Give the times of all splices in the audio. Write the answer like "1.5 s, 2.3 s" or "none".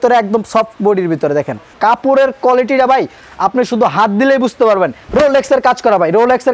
1.7 s, 5.0 s